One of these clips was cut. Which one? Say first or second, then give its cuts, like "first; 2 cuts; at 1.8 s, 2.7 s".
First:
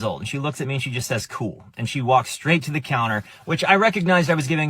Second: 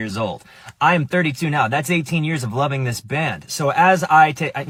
first; 1 cut; at 1.7 s